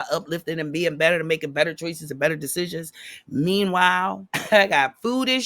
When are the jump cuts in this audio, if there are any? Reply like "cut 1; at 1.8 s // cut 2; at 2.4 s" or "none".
cut 1; at 4.3 s